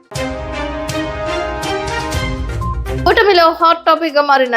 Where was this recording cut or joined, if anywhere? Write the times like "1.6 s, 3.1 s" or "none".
2.7 s